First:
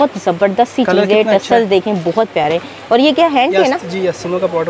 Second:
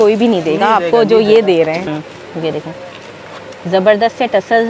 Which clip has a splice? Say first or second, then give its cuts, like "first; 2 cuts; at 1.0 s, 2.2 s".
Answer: second; 1 cut; at 1.9 s